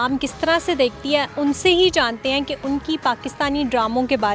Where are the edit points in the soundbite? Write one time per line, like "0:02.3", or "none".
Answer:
none